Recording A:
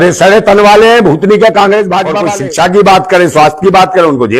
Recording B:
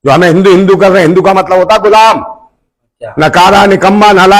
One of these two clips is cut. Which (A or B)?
A